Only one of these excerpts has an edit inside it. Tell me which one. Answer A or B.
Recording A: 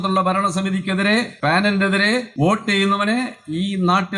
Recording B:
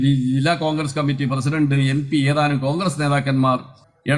A